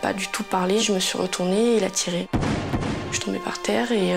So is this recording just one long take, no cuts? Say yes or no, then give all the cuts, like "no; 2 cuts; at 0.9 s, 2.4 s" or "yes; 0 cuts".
no; 2 cuts; at 2.2 s, 3.1 s